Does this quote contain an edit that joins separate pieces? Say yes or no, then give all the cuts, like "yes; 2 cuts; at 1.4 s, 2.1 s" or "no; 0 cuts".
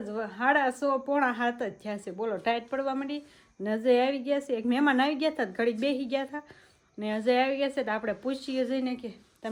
no; 0 cuts